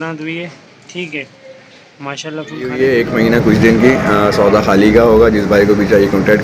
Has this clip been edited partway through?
yes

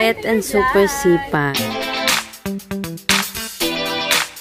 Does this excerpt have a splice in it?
yes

